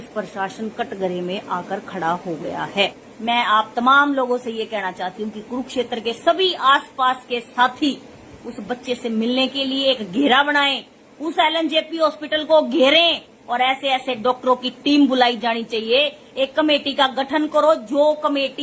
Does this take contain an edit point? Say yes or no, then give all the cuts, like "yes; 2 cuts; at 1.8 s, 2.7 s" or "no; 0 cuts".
yes; 1 cut; at 3.1 s